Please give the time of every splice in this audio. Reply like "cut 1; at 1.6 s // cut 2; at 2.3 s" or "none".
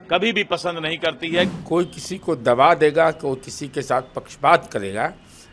cut 1; at 1.6 s